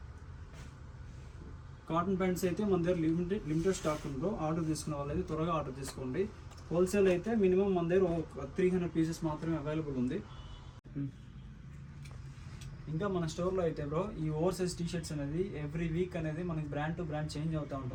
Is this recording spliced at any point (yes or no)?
no